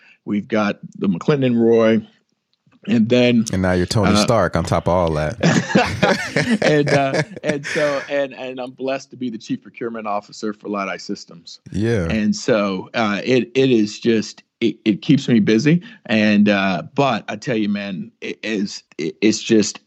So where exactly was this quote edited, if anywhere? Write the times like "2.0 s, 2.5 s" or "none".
18.8 s